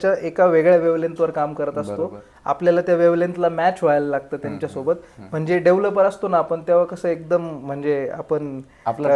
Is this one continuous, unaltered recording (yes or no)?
yes